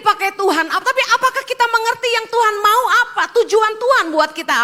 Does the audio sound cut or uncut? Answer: uncut